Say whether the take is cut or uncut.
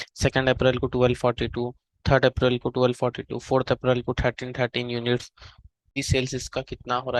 cut